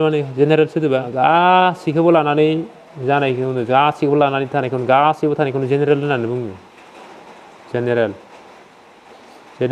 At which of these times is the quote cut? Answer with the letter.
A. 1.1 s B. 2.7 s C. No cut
A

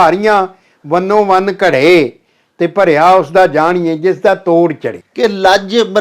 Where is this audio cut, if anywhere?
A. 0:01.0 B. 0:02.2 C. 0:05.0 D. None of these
C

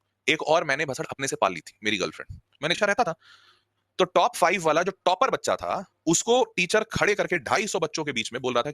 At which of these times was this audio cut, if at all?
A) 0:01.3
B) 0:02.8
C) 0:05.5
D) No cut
B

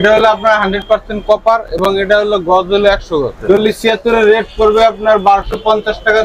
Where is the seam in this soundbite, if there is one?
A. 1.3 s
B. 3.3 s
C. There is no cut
B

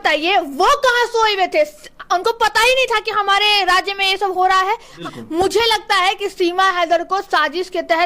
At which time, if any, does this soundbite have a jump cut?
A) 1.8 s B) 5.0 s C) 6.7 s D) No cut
B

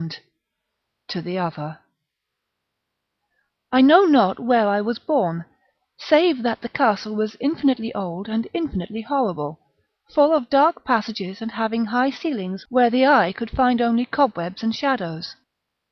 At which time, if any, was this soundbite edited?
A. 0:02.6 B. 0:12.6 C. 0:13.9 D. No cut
D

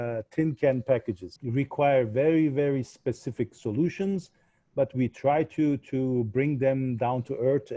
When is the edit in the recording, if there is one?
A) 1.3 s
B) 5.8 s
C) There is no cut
A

